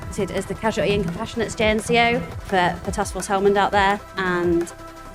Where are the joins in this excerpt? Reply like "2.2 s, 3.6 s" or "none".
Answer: 2.4 s, 4.1 s